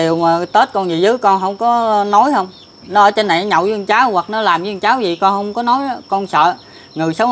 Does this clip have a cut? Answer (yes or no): no